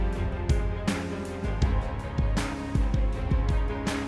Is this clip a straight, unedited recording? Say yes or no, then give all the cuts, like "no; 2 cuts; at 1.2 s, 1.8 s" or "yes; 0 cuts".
yes; 0 cuts